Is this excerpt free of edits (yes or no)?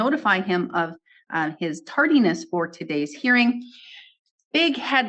yes